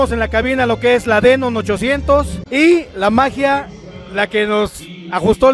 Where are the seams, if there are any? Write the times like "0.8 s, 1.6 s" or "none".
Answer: 2.4 s